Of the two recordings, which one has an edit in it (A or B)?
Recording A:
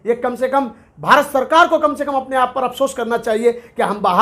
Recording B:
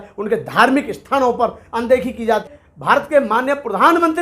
B